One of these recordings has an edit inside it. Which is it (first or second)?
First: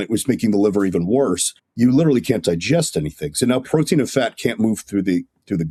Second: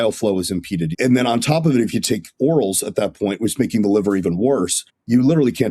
second